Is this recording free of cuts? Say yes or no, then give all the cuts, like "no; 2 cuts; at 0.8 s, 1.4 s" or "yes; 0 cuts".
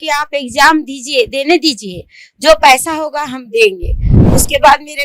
yes; 0 cuts